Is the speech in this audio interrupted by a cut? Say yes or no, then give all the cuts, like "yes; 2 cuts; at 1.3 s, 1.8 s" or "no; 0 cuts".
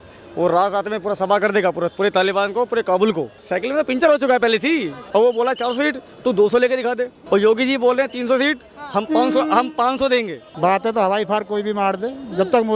yes; 4 cuts; at 3.4 s, 5.0 s, 7.2 s, 10.5 s